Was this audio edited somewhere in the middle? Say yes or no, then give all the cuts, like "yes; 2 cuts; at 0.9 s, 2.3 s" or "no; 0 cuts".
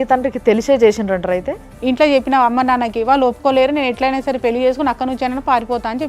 yes; 1 cut; at 1.7 s